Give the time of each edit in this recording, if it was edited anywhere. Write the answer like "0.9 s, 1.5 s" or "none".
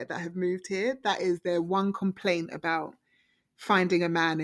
none